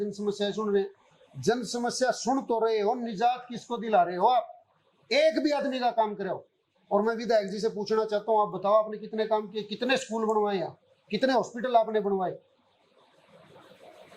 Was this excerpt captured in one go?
yes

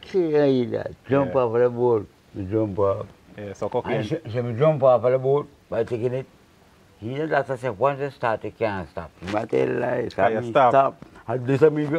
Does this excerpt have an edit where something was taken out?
no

